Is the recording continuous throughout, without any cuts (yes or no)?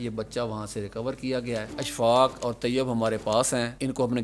no